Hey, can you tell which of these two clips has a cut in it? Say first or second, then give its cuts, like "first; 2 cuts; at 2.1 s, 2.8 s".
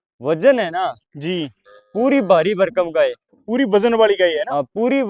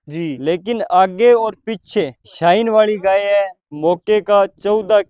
second; 2 cuts; at 2.2 s, 3.6 s